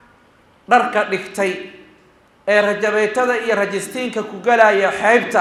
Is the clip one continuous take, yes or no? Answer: yes